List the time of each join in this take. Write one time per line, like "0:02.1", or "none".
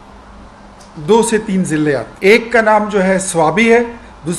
0:02.1